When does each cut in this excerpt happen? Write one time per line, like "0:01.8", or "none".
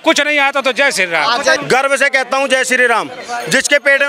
0:01.6